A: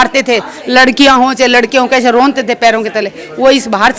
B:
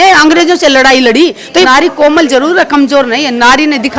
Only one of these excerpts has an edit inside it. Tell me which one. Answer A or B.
B